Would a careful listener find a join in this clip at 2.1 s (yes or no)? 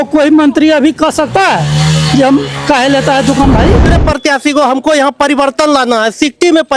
no